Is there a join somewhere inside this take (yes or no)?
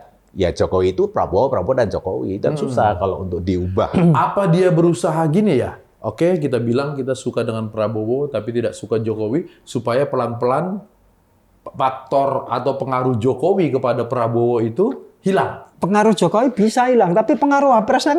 no